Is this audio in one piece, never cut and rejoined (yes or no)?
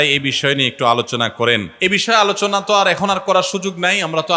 yes